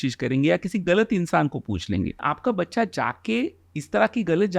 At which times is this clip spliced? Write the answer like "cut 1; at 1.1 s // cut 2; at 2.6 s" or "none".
cut 1; at 2.2 s